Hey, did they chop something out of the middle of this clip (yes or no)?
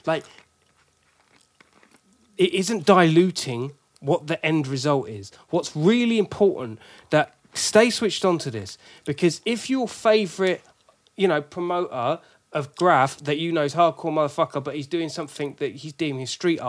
no